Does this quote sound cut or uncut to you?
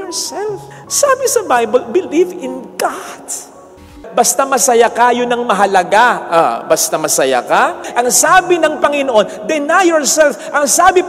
cut